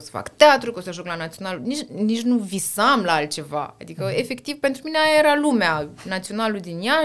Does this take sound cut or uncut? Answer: uncut